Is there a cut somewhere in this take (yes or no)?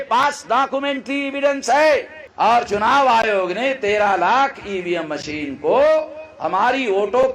yes